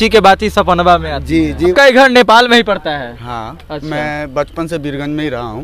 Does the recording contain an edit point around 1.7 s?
yes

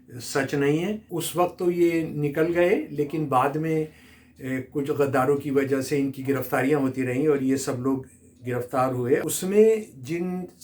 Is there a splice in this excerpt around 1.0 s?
yes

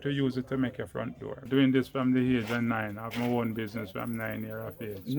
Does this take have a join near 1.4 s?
yes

